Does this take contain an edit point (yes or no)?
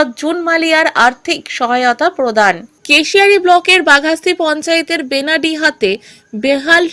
no